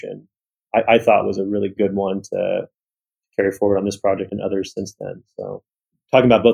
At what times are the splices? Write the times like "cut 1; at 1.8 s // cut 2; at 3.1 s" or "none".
cut 1; at 1.7 s // cut 2; at 4.3 s